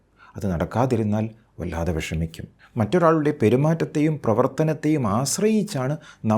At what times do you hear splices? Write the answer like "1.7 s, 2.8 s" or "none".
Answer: 2.6 s